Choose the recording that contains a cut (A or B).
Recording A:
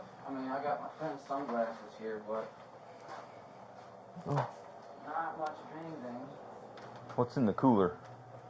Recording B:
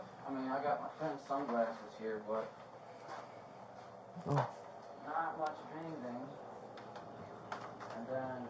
A